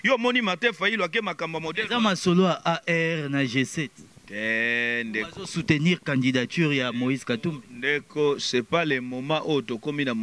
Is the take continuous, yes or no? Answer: yes